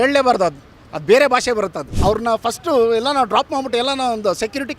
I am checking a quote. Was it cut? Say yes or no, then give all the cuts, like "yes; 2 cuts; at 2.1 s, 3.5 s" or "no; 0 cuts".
yes; 1 cut; at 1.9 s